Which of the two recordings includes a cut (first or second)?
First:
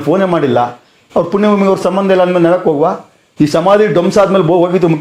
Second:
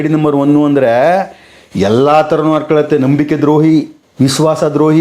second